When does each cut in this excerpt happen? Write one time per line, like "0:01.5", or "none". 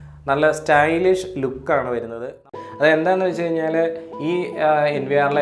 0:02.5